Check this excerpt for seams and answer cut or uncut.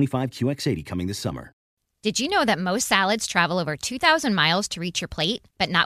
cut